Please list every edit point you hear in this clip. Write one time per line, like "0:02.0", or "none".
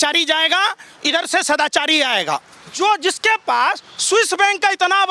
0:02.6